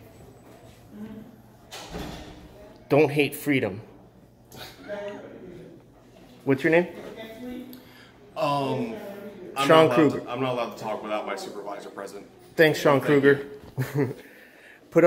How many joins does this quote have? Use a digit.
0